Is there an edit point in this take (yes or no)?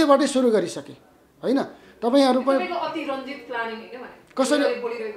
no